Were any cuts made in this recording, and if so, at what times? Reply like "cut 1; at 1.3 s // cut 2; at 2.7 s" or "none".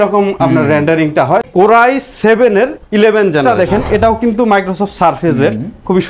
cut 1; at 1.5 s // cut 2; at 3.4 s